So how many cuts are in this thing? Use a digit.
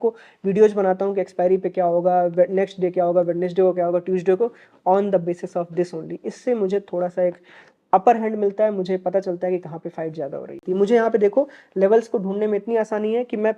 1